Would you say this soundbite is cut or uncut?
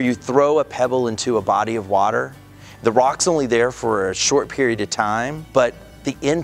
cut